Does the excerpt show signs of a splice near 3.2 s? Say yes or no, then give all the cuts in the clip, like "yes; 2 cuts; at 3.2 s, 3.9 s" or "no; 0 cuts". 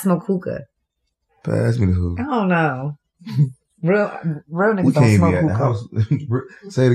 no; 1 cut; at 1.4 s